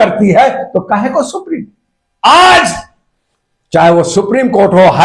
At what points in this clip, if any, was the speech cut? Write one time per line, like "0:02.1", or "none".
0:02.1